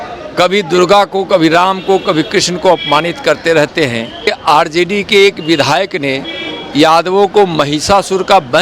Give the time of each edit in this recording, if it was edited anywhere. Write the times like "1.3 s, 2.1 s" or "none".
4.3 s